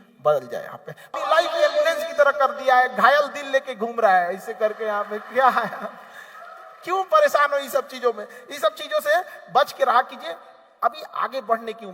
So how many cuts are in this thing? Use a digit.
1